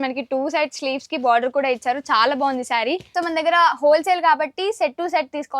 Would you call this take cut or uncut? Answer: cut